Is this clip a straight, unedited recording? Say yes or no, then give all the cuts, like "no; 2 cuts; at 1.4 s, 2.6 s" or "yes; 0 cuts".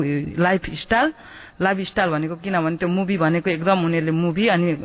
yes; 0 cuts